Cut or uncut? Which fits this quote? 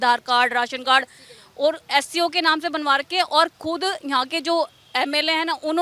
uncut